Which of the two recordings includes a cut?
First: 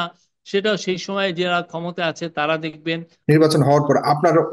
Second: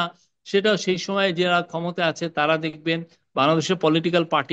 first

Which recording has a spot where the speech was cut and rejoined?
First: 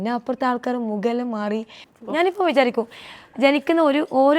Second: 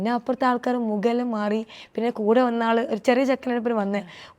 first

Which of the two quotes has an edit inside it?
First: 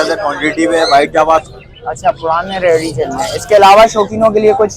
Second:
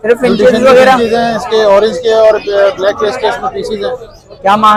first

